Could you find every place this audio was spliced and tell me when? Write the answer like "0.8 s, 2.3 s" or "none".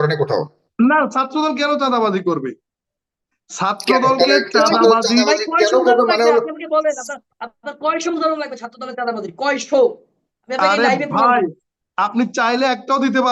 none